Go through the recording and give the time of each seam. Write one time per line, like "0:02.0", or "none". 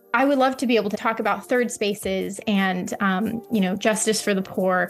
0:00.9